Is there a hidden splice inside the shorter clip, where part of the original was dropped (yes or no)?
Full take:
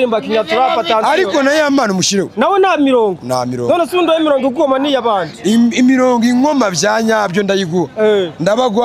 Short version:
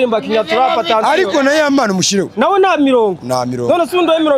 no